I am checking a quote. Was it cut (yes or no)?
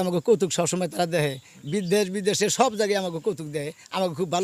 no